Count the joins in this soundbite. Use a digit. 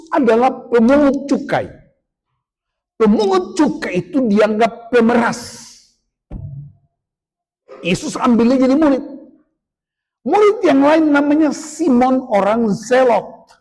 0